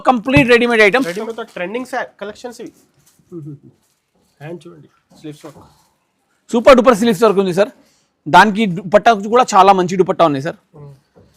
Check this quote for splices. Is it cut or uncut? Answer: cut